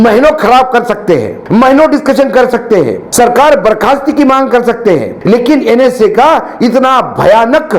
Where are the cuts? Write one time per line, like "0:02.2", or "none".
0:01.4
0:03.0
0:05.1